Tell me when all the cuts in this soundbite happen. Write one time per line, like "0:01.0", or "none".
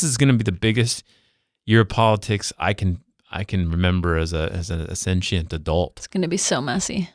0:06.0